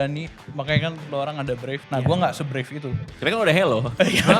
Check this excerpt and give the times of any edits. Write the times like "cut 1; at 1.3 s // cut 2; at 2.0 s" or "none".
cut 1; at 1.8 s